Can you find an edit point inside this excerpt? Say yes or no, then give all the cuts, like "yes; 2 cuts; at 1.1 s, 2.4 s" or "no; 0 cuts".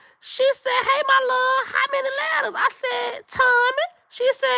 no; 0 cuts